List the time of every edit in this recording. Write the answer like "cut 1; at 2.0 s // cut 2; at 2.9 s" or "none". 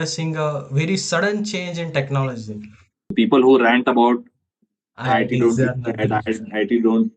cut 1; at 3.1 s